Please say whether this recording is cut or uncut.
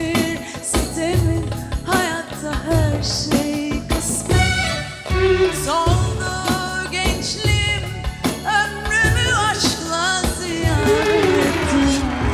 uncut